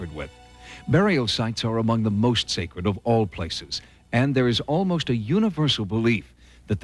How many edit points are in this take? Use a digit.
0